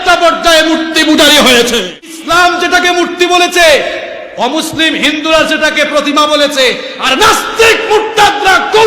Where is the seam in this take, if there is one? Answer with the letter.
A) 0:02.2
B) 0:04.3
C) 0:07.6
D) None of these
A